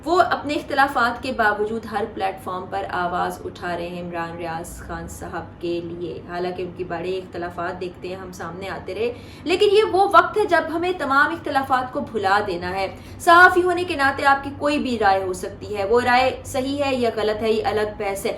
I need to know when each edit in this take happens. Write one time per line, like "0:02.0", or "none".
none